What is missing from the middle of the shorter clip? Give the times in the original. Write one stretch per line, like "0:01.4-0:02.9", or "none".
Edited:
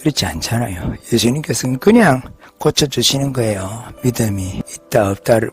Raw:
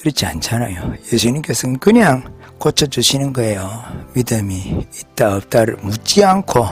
0:03.8-0:04.0
0:04.7-0:04.9